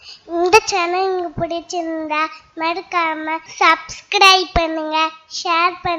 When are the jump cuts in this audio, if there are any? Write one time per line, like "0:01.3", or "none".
0:03.5